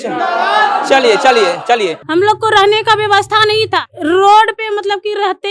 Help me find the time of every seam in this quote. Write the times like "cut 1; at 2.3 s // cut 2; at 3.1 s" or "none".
cut 1; at 2.0 s